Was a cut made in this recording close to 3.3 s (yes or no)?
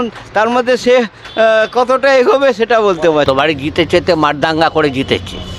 yes